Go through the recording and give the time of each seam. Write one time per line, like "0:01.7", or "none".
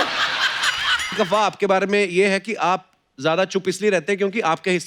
0:01.2